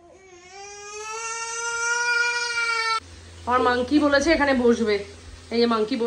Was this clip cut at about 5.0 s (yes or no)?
no